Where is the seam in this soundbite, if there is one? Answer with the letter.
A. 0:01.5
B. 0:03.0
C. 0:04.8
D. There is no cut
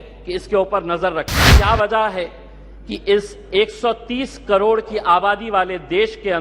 A